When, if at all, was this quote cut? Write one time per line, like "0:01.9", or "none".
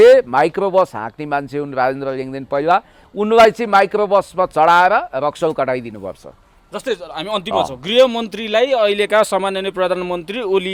none